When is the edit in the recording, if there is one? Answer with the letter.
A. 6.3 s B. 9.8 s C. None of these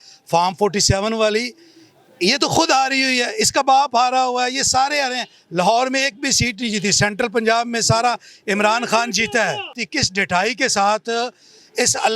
B